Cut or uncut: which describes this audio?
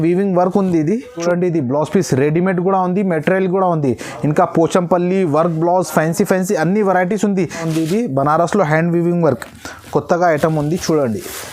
cut